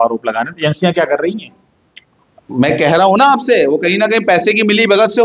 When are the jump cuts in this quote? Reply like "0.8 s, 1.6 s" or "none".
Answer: none